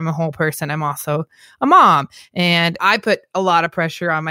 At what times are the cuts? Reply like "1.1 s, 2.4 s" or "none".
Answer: 2.8 s